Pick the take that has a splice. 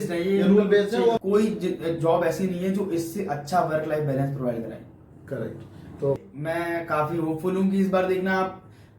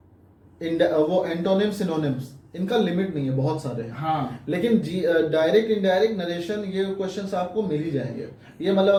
first; 2 cuts; at 1.2 s, 6.2 s

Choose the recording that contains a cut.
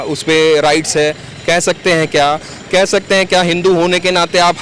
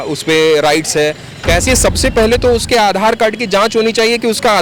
second; 1 cut; at 1.6 s

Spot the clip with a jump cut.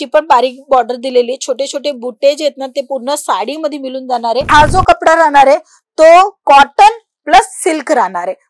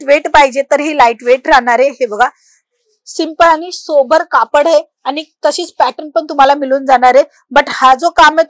first; 1 cut; at 4.5 s

